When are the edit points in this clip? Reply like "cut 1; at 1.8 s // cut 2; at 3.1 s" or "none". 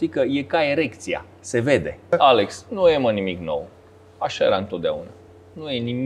cut 1; at 2.1 s

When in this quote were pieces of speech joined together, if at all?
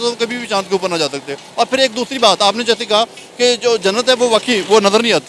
none

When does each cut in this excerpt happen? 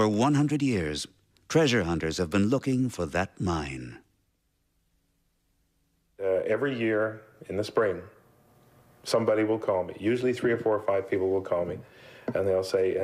cut 1; at 3.8 s

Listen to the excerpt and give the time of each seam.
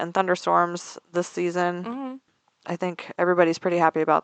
cut 1; at 2.2 s

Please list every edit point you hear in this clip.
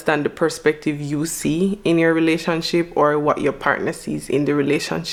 none

